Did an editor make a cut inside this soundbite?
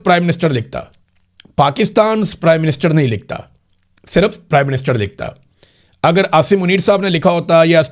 no; 0 cuts

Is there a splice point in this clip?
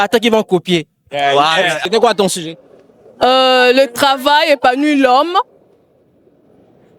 yes; 1 cut; at 1.8 s

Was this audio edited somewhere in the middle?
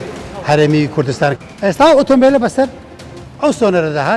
yes; 1 cut; at 1.4 s

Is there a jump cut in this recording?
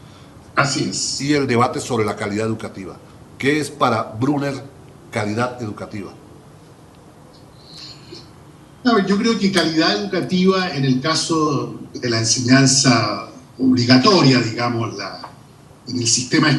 no; 0 cuts

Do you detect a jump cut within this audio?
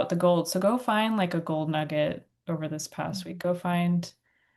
no; 0 cuts

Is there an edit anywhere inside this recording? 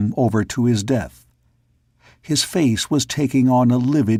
no; 0 cuts

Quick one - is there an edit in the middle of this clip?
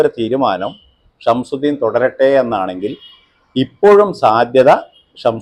no; 0 cuts

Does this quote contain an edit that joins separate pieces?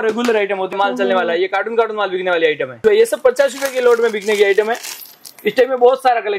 yes; 2 cuts; at 0.7 s, 2.7 s

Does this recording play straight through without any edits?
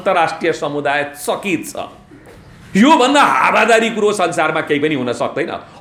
yes; 0 cuts

